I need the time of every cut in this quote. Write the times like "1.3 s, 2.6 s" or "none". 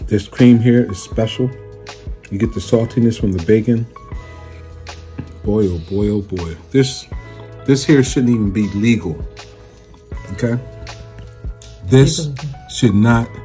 none